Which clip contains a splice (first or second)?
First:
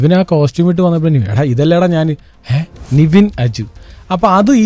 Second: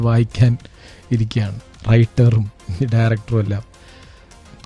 first